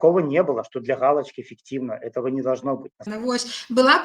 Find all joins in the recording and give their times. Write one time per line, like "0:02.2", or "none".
0:03.1